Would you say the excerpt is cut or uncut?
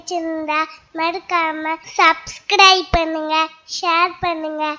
cut